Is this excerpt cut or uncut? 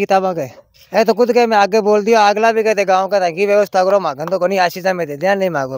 uncut